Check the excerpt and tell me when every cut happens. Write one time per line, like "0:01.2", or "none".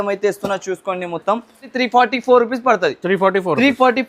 0:01.7